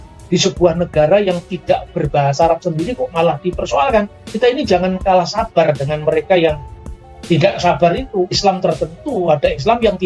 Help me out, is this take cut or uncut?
cut